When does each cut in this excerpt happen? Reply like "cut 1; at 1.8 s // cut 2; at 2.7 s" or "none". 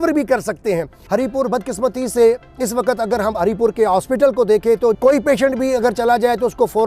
cut 1; at 0.9 s // cut 2; at 5.0 s